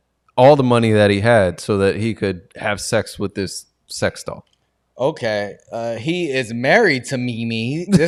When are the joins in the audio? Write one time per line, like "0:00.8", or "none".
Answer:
none